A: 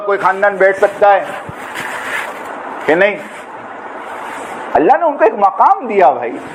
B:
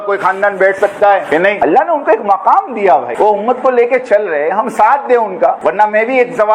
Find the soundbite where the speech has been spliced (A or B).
B